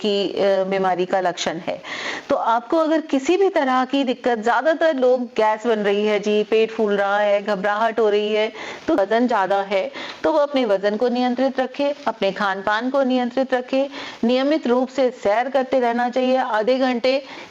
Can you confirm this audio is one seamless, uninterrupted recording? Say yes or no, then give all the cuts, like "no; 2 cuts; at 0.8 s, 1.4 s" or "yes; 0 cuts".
no; 1 cut; at 9.0 s